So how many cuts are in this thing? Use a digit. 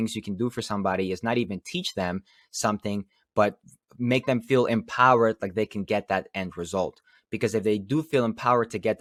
0